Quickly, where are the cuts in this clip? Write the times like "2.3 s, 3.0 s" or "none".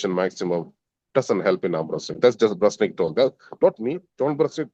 none